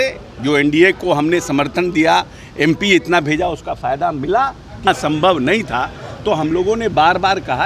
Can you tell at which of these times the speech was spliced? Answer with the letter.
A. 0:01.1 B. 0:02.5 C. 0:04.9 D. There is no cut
C